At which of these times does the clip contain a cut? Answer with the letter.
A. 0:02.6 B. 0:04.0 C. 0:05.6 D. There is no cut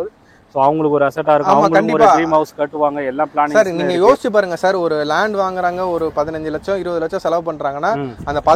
D